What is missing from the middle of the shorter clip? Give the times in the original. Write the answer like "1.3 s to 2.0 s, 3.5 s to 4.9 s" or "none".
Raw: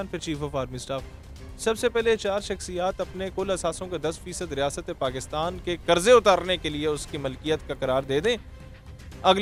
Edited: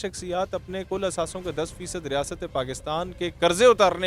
none